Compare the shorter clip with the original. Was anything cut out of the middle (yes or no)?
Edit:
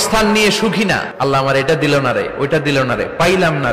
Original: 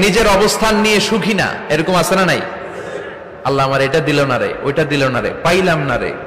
yes